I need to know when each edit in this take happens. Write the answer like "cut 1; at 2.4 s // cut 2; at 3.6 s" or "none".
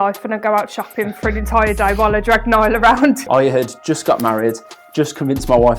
cut 1; at 3.2 s